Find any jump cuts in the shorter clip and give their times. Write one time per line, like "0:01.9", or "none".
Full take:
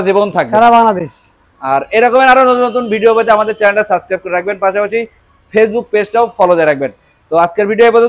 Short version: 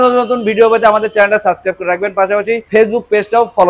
0:02.6

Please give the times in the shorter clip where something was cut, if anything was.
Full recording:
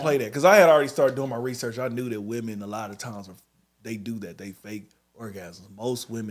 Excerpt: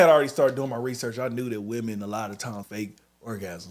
0:02.7

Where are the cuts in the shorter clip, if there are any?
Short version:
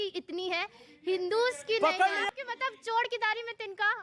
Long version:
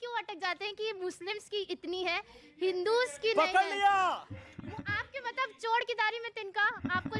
0:02.2

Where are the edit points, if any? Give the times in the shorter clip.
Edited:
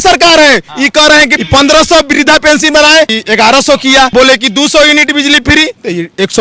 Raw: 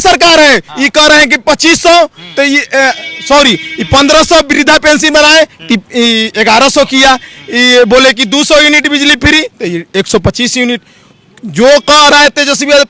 0:01.3
0:03.2
0:04.1

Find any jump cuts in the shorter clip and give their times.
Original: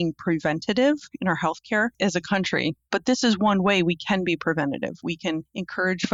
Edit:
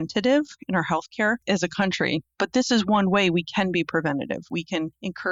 none

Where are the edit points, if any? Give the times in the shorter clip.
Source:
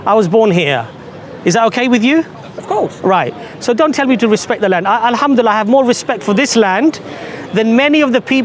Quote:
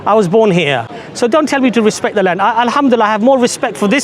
0:01.0

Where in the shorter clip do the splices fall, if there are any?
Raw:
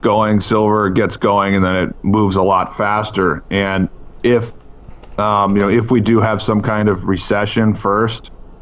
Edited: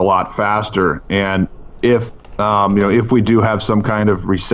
0:02.2

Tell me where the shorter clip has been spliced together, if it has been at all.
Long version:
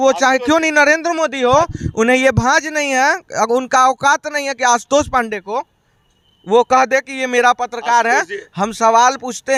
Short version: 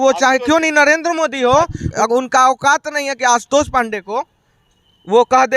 0:01.9

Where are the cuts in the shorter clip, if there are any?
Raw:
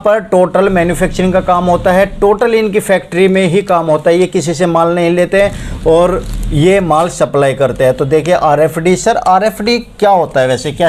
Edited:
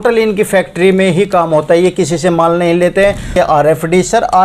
0:03.3

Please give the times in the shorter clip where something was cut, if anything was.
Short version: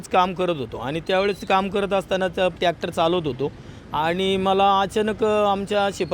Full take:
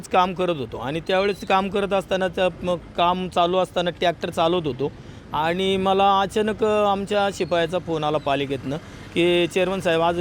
0:02.6

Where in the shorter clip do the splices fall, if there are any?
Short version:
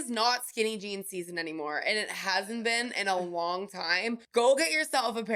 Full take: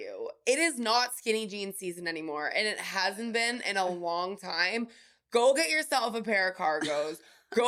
0:04.2

